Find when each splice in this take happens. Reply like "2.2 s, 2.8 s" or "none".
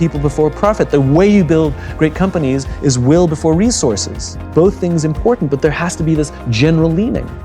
4.4 s